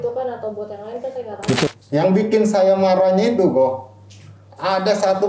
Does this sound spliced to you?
yes; 1 cut; at 1.7 s

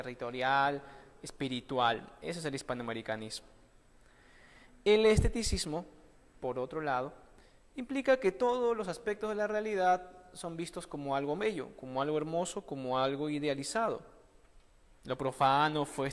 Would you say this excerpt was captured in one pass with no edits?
yes; 0 cuts

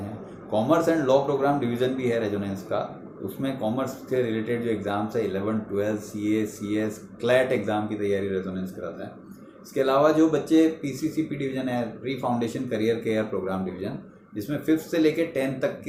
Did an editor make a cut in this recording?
no; 0 cuts

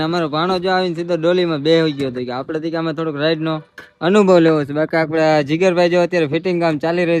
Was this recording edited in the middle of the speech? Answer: no; 0 cuts

